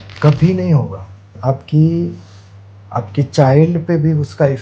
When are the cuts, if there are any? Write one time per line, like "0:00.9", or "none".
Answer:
0:01.4